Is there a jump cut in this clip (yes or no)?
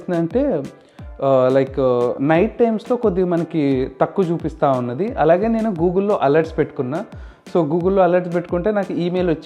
no